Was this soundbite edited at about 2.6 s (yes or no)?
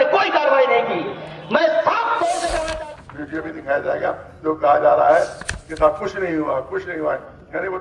yes